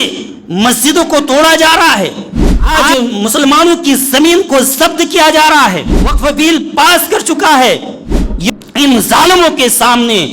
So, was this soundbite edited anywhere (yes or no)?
yes